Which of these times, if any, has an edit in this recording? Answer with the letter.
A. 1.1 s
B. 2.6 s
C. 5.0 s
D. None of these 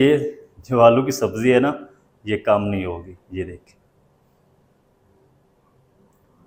D